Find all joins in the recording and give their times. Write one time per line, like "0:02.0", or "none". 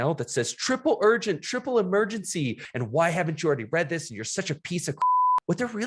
none

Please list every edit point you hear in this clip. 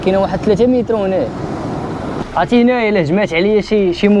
0:02.2

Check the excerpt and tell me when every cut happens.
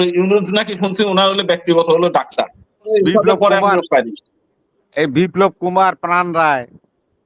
0:02.8

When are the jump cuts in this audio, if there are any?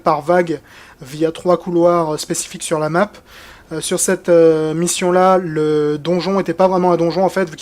none

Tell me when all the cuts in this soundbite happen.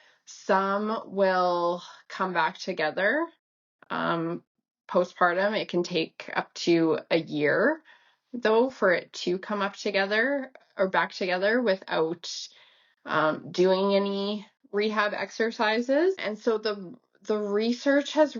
0:16.2

